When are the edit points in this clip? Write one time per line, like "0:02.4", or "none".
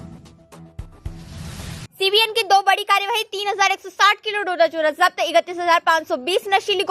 0:01.8